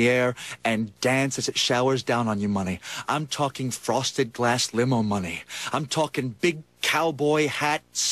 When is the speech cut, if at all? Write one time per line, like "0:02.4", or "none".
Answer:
0:06.7